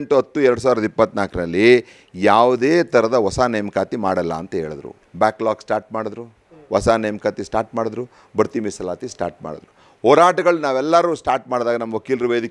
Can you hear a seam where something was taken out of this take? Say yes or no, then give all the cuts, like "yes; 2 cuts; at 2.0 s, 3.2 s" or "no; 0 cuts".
no; 0 cuts